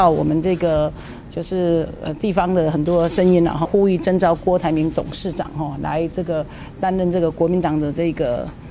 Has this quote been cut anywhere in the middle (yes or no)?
yes